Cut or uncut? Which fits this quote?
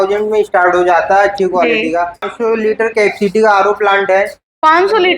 cut